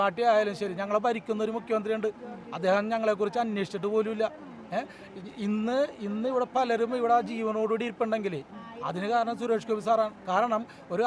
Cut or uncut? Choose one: uncut